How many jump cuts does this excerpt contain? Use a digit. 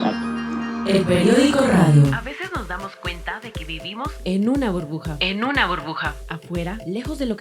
1